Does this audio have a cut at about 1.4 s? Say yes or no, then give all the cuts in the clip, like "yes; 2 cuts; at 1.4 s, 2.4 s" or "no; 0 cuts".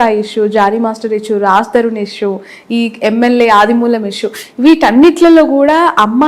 no; 0 cuts